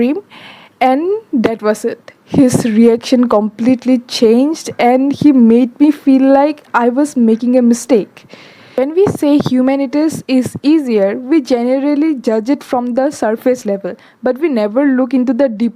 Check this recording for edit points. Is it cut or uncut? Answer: cut